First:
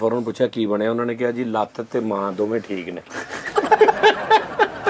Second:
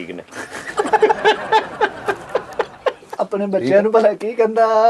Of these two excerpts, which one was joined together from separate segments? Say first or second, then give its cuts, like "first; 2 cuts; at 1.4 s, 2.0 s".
second; 1 cut; at 3.1 s